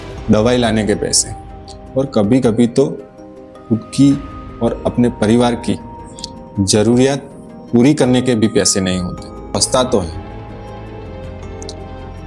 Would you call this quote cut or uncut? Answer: cut